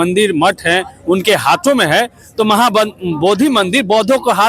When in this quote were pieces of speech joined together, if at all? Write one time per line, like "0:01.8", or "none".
none